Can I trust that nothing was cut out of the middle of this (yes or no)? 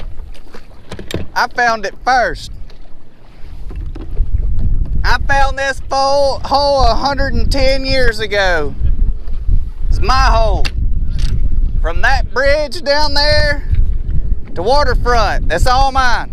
yes